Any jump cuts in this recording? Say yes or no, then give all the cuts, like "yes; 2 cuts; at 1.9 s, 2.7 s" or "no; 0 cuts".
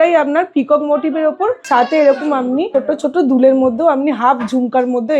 yes; 2 cuts; at 1.6 s, 2.7 s